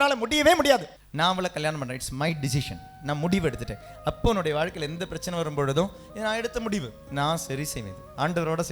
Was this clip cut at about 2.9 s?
no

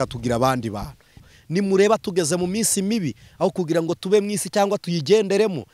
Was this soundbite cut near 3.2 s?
no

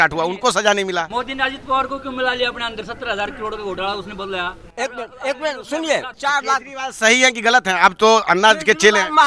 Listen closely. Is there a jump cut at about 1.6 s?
no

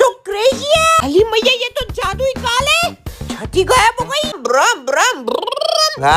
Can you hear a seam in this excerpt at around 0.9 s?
yes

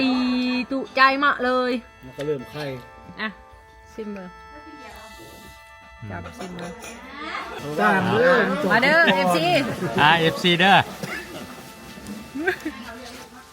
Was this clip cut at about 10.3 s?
no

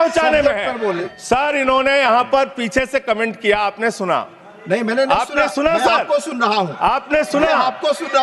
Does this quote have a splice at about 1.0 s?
yes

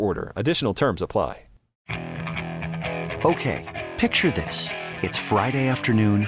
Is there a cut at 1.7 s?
yes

